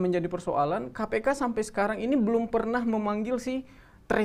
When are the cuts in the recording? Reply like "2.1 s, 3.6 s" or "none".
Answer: none